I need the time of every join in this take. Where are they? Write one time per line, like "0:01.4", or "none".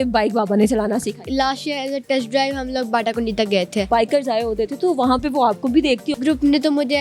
0:01.2
0:03.9
0:06.1